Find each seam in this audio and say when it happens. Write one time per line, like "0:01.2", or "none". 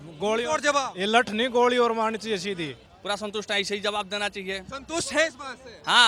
0:02.9